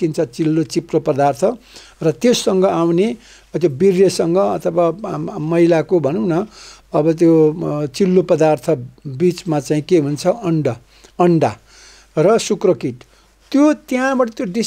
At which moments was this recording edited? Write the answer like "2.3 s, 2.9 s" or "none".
none